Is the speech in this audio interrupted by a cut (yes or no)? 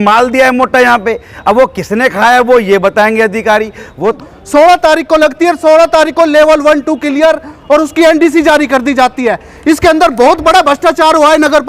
yes